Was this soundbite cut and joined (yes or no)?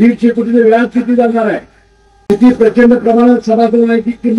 no